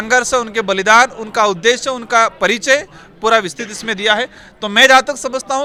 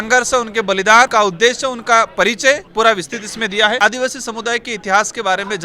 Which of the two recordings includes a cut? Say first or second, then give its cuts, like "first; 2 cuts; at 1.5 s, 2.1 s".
second; 3 cuts; at 1.1 s, 2.7 s, 3.8 s